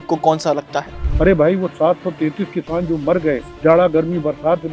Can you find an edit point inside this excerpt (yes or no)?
yes